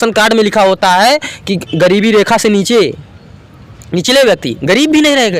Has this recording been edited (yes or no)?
no